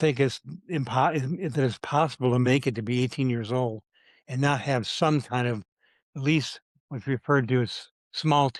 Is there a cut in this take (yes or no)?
no